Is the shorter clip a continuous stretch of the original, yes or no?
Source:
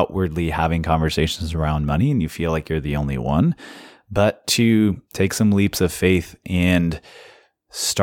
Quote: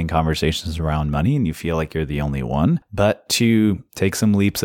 no